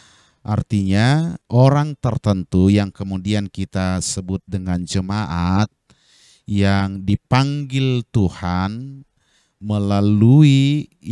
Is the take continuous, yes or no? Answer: no